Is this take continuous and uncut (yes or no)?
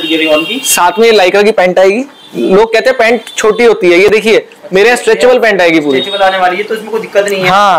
yes